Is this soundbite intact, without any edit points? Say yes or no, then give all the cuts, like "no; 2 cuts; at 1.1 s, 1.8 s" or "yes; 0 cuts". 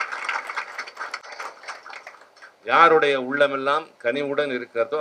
yes; 0 cuts